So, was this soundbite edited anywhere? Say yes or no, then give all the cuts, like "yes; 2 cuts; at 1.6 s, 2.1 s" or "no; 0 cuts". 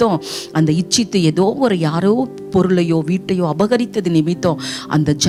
no; 0 cuts